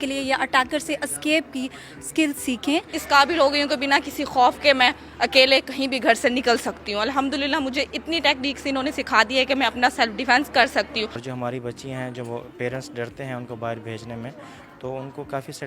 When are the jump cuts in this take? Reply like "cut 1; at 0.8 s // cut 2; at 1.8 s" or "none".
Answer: cut 1; at 2.9 s // cut 2; at 11.2 s